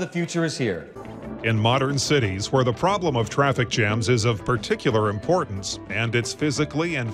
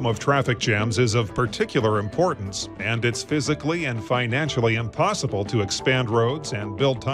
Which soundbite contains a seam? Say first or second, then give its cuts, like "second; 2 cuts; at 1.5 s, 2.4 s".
first; 1 cut; at 1.1 s